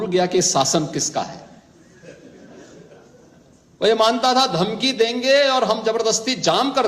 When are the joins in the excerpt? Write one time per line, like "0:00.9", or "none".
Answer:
none